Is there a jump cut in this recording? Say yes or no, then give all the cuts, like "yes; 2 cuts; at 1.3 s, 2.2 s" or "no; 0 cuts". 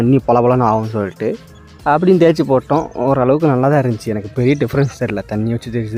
no; 0 cuts